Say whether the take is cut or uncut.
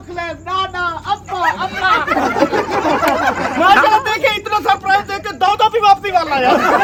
uncut